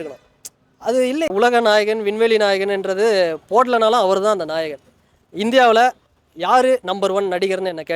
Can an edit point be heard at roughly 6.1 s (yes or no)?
no